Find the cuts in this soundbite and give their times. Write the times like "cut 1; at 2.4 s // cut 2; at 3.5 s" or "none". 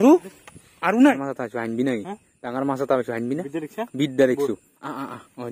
cut 1; at 1.2 s